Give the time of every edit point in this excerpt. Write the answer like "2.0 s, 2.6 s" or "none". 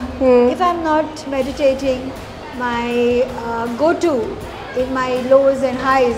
none